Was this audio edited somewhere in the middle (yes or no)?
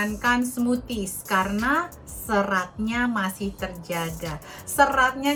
no